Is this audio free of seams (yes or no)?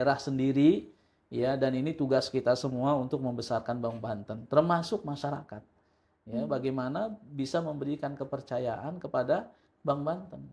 yes